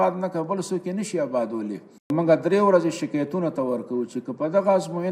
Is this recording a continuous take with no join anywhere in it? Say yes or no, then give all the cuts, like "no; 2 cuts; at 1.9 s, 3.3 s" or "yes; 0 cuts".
no; 1 cut; at 2.1 s